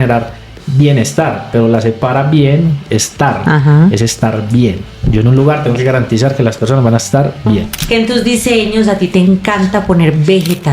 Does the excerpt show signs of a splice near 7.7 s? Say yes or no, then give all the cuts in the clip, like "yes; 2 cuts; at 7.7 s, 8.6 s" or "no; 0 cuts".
yes; 1 cut; at 7.7 s